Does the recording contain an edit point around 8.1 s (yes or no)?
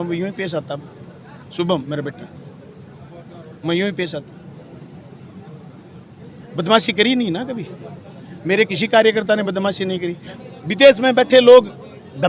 no